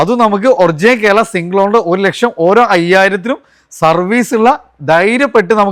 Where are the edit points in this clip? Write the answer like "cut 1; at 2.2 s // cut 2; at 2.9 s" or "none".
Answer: none